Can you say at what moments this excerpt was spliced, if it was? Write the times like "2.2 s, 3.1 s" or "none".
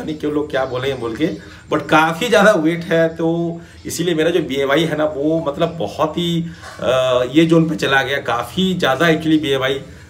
none